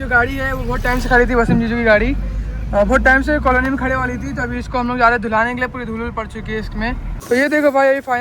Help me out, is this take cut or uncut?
cut